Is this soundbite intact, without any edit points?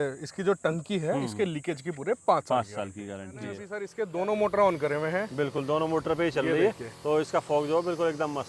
no; 1 cut; at 3.8 s

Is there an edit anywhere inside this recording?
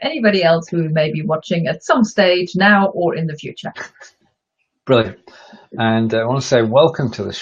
no; 0 cuts

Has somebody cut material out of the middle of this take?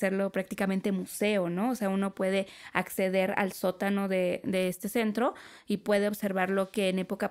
no; 0 cuts

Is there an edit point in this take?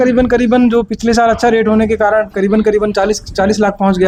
no; 0 cuts

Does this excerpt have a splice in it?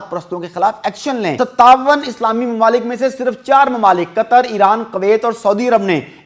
yes; 1 cut; at 1.3 s

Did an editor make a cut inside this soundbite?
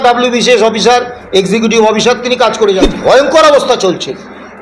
yes; 1 cut; at 2.8 s

